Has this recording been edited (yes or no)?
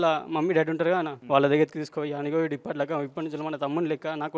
yes